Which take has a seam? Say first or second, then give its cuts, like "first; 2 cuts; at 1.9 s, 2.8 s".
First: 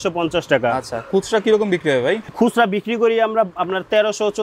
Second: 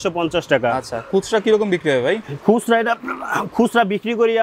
first; 1 cut; at 2.3 s